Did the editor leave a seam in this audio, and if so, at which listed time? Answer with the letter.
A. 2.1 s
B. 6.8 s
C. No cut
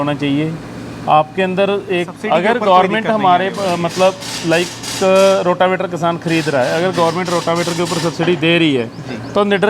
A